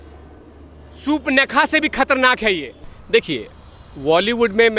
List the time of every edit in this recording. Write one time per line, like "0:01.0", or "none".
0:02.9